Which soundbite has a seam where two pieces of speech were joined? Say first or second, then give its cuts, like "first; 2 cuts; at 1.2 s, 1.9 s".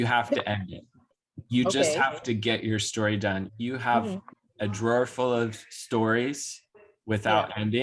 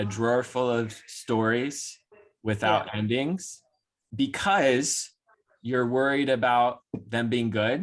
first; 2 cuts; at 1.3 s, 3.5 s